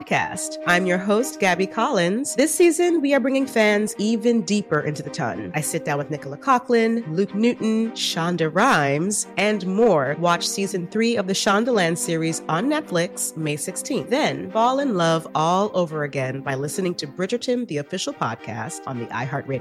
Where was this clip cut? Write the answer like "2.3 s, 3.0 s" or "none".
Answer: none